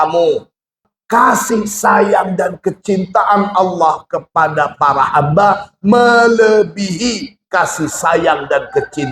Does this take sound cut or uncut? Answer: cut